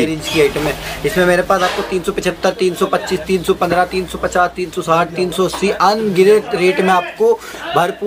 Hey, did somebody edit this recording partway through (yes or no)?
no